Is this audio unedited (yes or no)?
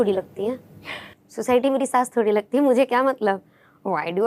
yes